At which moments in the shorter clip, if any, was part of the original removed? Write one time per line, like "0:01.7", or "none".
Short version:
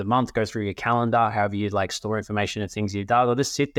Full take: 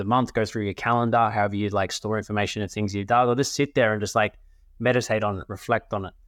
none